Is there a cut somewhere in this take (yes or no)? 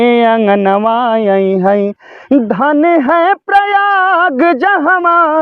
no